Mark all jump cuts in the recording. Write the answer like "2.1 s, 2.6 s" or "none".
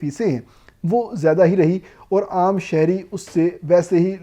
none

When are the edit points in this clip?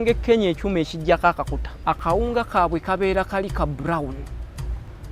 1.6 s

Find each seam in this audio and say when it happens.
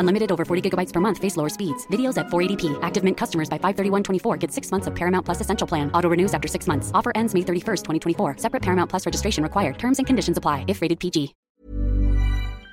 11.5 s

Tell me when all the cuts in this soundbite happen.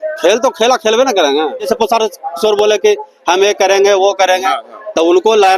1.7 s

